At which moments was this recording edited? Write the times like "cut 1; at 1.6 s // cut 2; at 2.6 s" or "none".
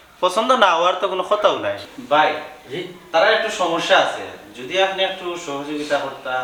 none